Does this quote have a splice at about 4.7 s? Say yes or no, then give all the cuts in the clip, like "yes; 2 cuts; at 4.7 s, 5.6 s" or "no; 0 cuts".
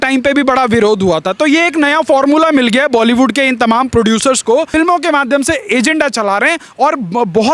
yes; 1 cut; at 4.7 s